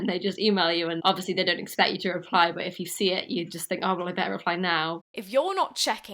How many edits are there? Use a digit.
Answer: 2